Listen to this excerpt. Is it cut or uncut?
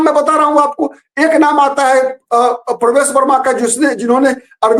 uncut